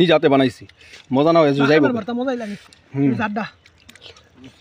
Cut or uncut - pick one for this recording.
uncut